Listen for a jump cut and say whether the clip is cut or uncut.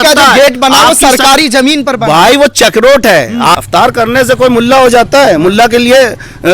cut